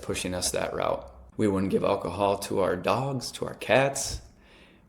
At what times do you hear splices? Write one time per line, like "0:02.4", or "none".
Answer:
0:01.2